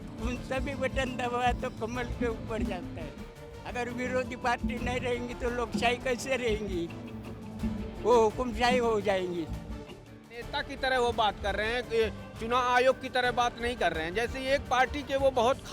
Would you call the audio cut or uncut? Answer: cut